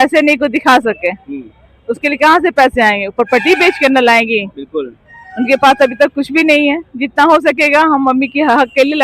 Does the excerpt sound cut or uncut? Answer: uncut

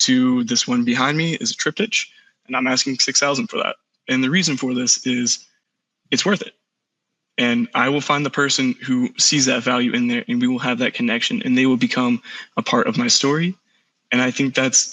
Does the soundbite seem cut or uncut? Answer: uncut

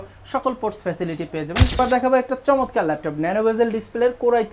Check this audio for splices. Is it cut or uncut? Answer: cut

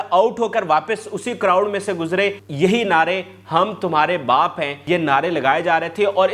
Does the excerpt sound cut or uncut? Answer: cut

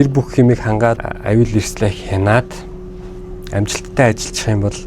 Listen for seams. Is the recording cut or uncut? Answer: cut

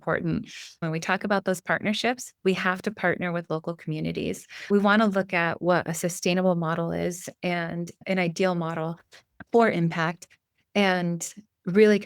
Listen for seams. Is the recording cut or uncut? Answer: cut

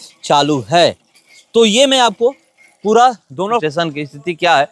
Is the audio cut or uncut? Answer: cut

